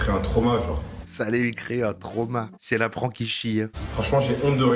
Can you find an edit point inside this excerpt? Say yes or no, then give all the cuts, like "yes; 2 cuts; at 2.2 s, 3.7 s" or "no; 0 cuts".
yes; 2 cuts; at 1.0 s, 3.8 s